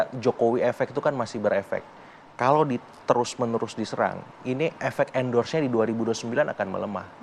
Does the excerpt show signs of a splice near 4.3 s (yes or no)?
no